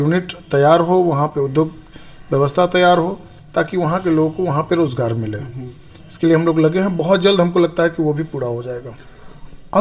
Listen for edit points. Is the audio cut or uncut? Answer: uncut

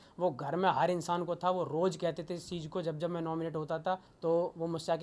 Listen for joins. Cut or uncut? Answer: cut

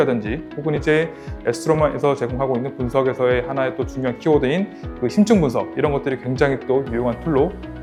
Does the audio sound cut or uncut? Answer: uncut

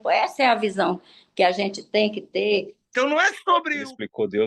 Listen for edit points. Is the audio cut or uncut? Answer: cut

